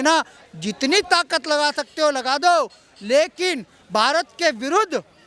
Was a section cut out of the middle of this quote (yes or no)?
no